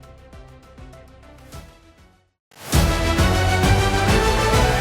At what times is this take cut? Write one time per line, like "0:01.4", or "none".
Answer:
0:02.4